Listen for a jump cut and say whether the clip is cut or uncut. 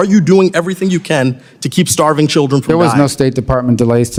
uncut